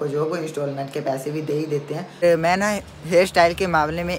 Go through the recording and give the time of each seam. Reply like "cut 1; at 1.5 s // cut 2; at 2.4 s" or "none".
cut 1; at 2.2 s